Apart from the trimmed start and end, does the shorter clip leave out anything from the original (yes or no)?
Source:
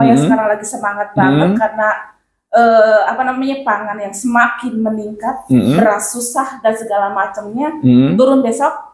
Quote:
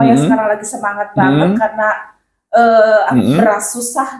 yes